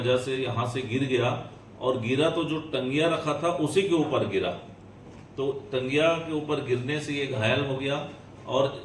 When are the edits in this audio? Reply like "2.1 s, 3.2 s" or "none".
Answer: none